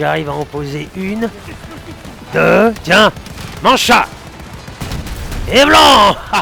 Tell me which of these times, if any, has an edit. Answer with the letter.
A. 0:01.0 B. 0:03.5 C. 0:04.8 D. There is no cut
D